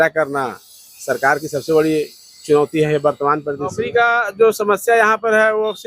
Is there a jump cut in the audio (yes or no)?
yes